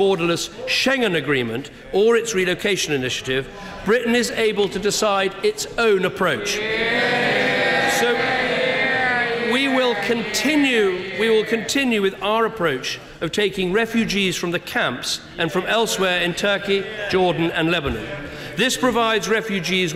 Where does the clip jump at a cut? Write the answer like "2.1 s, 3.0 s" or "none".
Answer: none